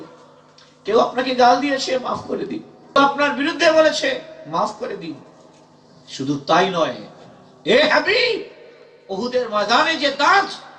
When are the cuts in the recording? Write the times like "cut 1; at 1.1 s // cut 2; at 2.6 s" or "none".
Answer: cut 1; at 3.0 s